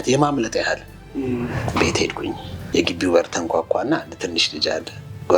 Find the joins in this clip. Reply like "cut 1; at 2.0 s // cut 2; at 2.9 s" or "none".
cut 1; at 2.5 s